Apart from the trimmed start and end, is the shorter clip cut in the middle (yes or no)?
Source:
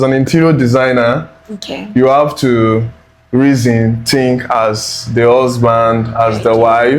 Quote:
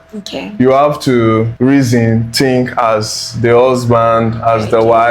yes